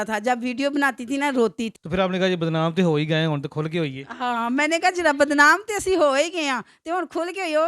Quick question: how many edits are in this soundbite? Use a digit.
1